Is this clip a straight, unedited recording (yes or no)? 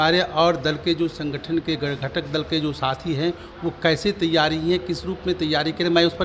yes